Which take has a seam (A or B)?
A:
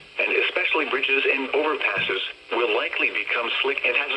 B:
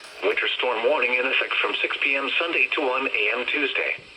B